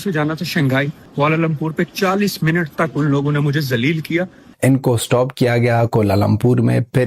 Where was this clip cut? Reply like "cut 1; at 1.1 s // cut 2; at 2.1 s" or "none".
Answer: cut 1; at 1.0 s // cut 2; at 4.4 s